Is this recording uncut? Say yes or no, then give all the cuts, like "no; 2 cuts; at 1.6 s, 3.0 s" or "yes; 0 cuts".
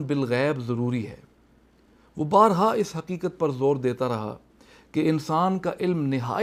yes; 0 cuts